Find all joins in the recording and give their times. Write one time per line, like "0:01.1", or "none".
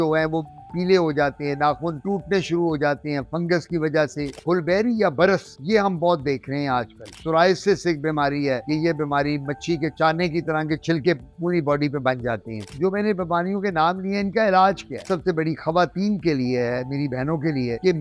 0:04.3
0:07.1
0:08.6
0:12.7
0:15.0